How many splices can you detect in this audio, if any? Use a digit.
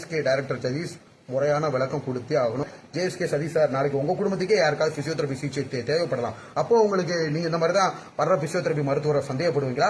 1